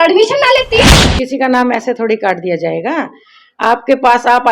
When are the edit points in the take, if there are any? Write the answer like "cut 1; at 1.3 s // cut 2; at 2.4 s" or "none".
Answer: cut 1; at 1.1 s

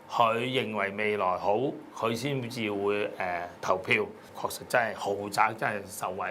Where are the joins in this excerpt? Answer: cut 1; at 4.2 s

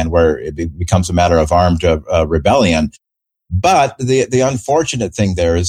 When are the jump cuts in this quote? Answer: none

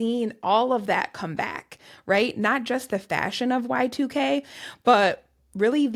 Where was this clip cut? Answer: none

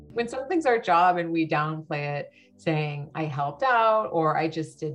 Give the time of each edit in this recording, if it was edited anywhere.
none

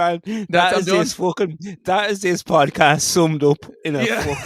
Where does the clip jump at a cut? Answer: none

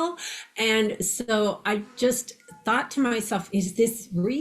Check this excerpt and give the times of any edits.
cut 1; at 3.5 s

